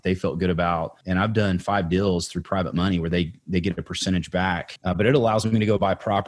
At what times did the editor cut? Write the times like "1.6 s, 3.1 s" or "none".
1.0 s, 4.7 s